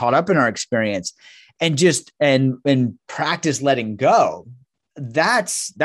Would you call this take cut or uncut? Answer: uncut